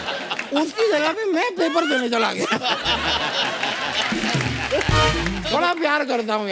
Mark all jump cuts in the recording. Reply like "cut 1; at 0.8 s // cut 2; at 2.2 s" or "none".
cut 1; at 5.4 s